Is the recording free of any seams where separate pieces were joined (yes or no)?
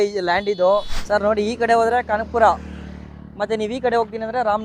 no